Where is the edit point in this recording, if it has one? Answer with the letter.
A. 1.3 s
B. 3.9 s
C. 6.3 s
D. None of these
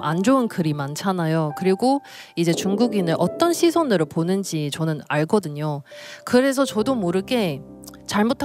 D